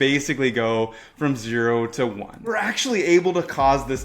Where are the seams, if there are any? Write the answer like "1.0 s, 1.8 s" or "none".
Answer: 2.5 s